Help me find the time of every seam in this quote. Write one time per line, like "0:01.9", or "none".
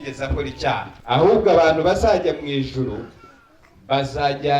0:00.9